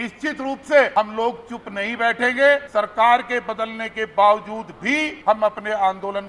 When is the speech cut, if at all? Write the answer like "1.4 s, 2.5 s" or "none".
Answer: 0.9 s, 2.7 s, 5.1 s